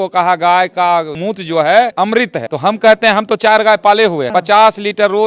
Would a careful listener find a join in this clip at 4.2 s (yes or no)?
yes